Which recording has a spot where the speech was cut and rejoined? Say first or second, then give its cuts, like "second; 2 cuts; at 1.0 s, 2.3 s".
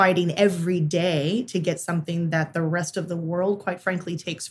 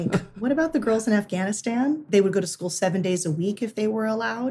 second; 1 cut; at 2.0 s